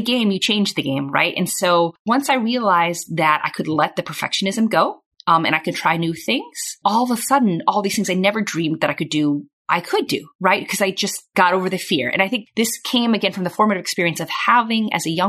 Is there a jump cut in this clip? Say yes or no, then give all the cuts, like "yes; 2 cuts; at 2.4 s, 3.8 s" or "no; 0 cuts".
yes; 1 cut; at 12.5 s